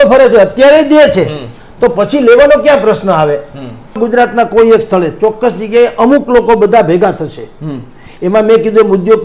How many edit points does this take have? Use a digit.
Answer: 1